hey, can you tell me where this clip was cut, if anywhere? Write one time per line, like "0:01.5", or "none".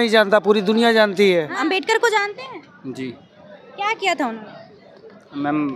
0:01.6